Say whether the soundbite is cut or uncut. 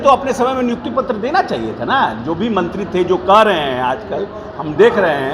uncut